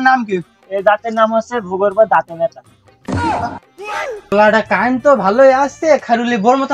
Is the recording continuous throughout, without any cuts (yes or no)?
no